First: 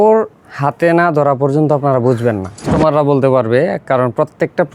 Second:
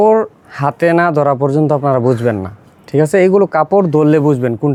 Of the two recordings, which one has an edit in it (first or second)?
first